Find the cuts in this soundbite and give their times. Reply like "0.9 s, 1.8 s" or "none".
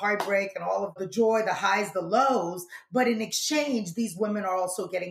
1.0 s